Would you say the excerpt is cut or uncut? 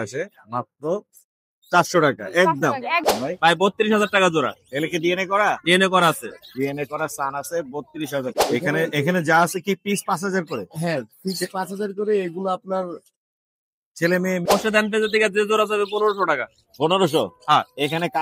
cut